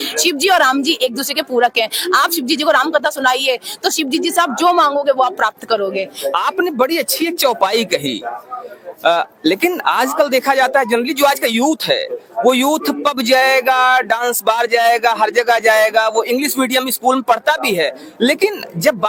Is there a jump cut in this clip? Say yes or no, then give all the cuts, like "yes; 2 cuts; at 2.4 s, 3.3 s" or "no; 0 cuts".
no; 0 cuts